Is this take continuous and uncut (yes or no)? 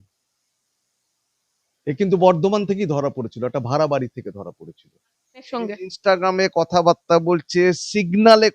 no